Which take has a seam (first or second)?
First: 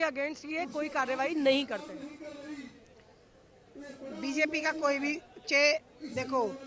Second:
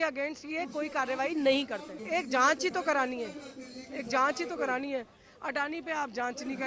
second